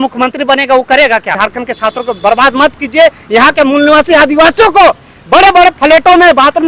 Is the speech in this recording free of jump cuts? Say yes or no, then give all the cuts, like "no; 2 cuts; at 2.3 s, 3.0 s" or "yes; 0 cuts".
no; 1 cut; at 1.4 s